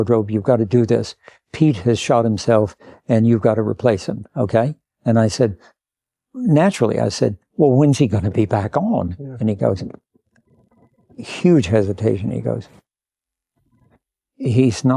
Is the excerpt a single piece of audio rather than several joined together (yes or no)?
yes